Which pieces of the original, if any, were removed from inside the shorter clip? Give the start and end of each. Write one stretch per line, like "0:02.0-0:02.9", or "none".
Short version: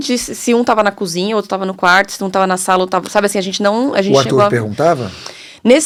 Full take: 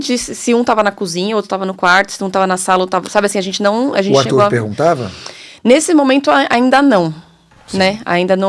none